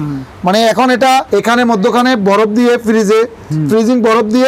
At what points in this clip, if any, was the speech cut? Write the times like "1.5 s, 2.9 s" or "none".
1.3 s